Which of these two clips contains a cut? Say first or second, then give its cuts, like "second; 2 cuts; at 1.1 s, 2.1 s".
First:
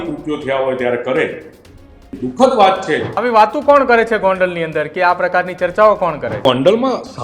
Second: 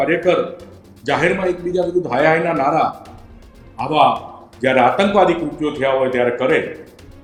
first; 2 cuts; at 3.1 s, 6.5 s